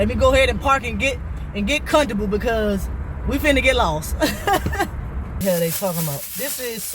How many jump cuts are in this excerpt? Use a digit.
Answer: 1